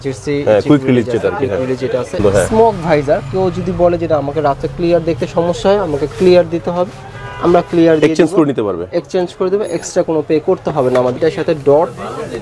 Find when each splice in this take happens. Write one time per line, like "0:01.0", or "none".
0:02.2
0:11.1